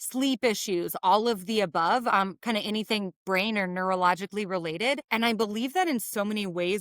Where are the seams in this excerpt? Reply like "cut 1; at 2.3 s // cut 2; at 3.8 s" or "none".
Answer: cut 1; at 5.0 s